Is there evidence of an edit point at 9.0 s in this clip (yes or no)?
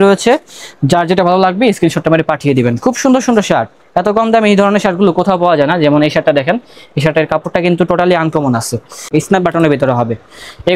yes